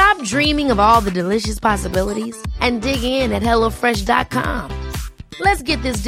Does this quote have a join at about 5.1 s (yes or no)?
no